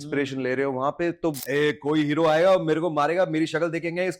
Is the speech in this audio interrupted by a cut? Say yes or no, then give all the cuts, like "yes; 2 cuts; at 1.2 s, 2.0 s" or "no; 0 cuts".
yes; 1 cut; at 1.4 s